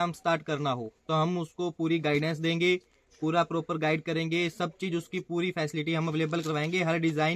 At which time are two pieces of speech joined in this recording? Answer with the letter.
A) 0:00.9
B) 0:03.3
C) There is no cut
C